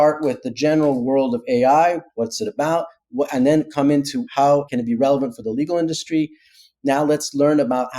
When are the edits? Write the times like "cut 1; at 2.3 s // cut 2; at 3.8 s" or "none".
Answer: cut 1; at 4.5 s

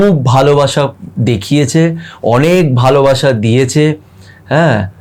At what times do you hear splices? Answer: none

